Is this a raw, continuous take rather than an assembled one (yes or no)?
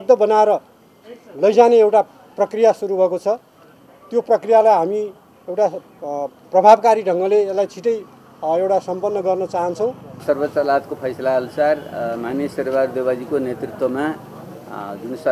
no